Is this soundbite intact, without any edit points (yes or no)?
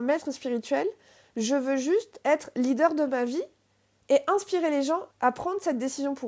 no